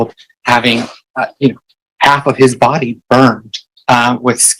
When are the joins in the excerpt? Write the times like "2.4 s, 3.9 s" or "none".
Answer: 1.0 s